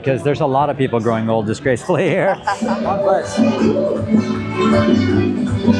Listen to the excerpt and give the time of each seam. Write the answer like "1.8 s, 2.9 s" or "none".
2.6 s